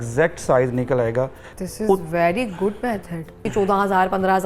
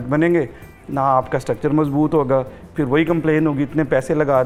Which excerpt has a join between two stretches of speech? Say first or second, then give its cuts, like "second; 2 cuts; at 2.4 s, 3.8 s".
first; 2 cuts; at 1.4 s, 3.5 s